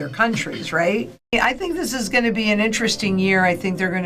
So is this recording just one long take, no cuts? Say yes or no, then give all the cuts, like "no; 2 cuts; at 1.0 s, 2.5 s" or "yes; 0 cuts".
no; 1 cut; at 1.2 s